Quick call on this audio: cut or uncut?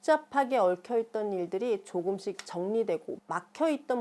uncut